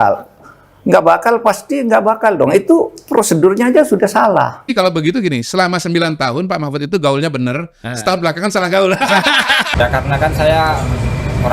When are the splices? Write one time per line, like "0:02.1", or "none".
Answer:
0:04.7
0:09.7